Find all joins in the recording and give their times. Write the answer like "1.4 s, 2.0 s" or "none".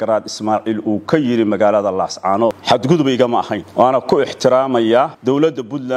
2.6 s, 3.6 s, 5.2 s